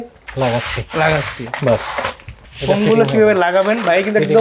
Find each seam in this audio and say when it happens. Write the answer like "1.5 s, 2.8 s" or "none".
none